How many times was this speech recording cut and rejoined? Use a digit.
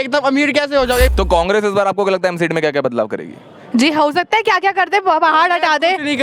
1